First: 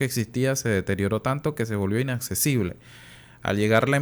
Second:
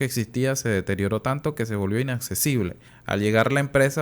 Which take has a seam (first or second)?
second